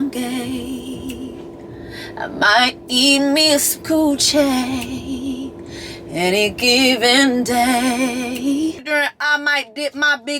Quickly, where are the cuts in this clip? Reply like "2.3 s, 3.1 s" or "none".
8.8 s